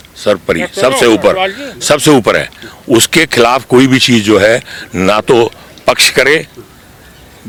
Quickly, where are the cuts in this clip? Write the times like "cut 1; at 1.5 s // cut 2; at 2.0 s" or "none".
none